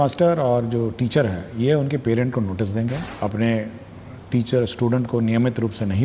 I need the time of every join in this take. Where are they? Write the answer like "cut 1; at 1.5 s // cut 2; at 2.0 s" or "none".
cut 1; at 3.1 s